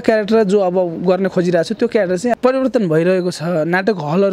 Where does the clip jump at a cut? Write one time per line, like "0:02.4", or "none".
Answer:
0:02.3